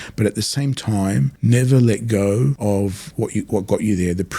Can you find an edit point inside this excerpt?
yes; 2 cuts; at 1.3 s, 2.6 s

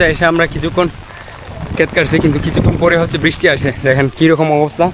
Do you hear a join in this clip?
no; 0 cuts

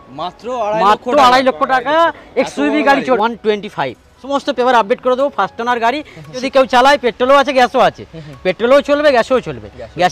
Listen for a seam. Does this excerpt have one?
yes; 3 cuts; at 3.2 s, 4.2 s, 6.4 s

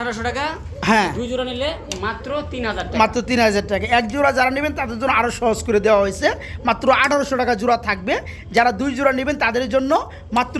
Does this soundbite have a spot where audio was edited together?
no; 0 cuts

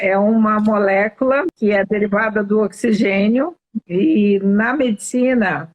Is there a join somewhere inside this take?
yes; 1 cut; at 1.5 s

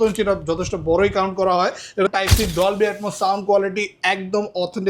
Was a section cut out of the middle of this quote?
yes; 1 cut; at 2.1 s

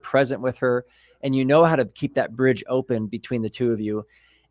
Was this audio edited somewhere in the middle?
no; 0 cuts

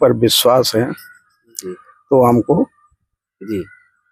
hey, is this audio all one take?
yes; 0 cuts

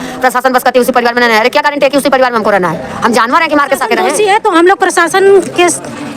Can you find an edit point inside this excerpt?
yes; 1 cut; at 4.1 s

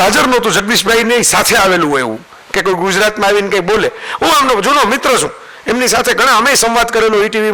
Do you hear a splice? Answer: no; 0 cuts

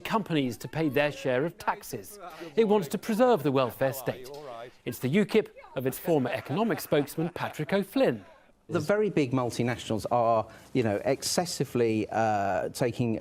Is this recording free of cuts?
yes; 0 cuts

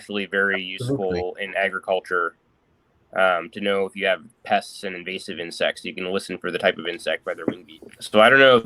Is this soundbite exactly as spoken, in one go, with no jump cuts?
no; 1 cut; at 7.4 s

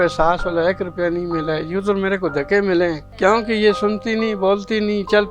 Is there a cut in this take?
yes; 1 cut; at 3.2 s

